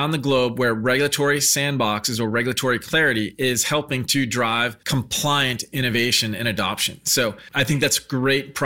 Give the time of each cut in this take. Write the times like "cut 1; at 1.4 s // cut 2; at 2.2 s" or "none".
cut 1; at 4.8 s // cut 2; at 7.4 s